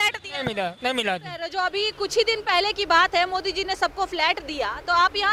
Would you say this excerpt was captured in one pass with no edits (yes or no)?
no